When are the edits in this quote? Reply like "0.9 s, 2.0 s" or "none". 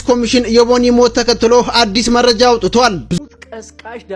3.2 s